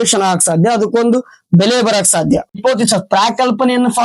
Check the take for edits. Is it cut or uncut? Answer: cut